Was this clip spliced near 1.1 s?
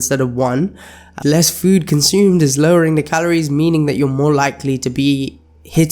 yes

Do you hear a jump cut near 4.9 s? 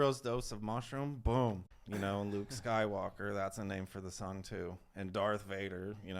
no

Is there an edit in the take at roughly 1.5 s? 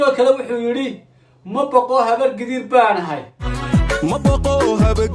no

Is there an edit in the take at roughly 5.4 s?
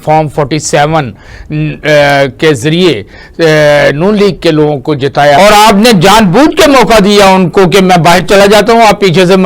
yes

